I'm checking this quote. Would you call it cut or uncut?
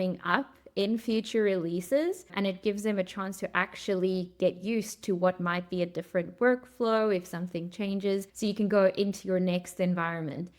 cut